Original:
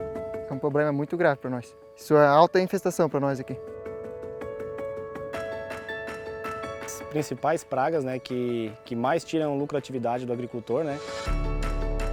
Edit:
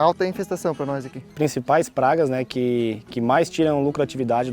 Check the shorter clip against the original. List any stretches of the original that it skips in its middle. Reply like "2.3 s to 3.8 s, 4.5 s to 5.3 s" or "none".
3.5 s to 6.9 s